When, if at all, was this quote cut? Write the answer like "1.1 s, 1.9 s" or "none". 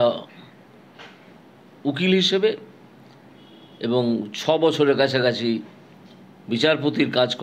none